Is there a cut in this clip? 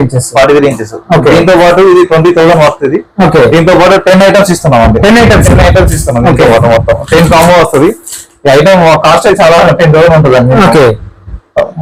no; 0 cuts

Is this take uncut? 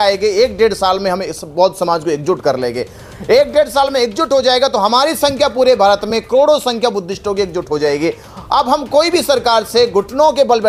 yes; 0 cuts

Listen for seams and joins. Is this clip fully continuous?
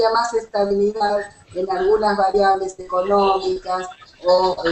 no; 1 cut; at 3.2 s

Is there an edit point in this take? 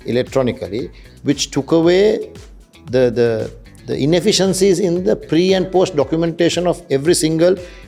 no; 0 cuts

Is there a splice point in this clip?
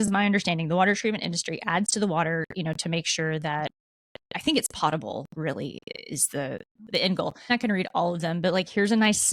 yes; 1 cut; at 7.5 s

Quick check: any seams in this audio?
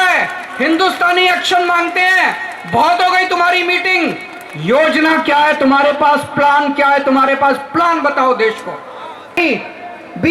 yes; 1 cut; at 9.4 s

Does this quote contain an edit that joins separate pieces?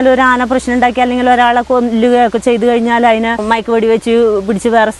yes; 1 cut; at 3.4 s

